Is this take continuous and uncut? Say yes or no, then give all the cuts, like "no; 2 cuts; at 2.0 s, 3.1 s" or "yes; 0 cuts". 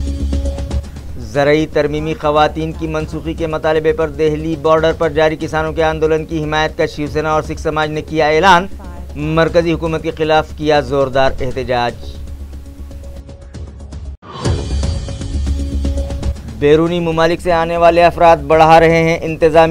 no; 3 cuts; at 12.1 s, 14.1 s, 16.5 s